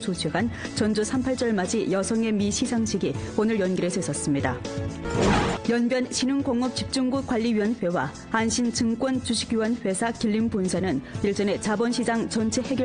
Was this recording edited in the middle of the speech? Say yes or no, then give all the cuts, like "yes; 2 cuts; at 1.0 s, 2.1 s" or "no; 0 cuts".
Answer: no; 0 cuts